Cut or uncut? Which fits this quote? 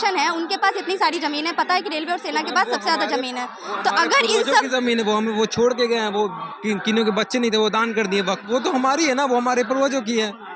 cut